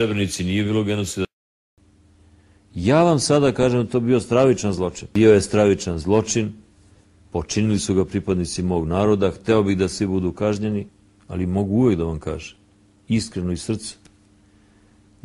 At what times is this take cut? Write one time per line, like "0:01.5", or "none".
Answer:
0:13.6